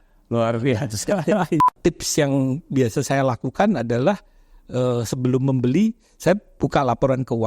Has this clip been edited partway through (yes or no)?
yes